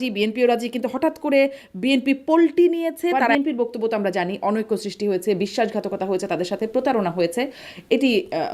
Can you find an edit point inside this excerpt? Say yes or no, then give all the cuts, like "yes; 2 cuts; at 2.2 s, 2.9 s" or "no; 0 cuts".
yes; 1 cut; at 3.2 s